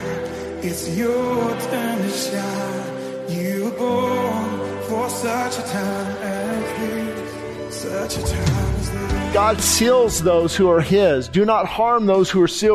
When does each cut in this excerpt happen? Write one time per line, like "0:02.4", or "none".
0:09.3